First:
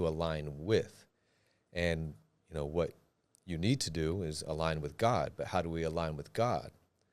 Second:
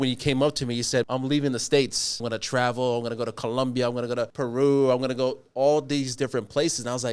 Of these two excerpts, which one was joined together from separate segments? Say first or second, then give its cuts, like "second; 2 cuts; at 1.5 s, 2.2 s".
second; 3 cuts; at 1.0 s, 2.2 s, 4.3 s